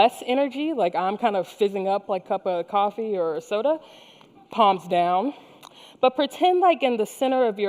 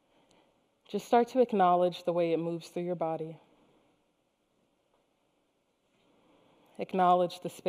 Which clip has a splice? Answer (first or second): first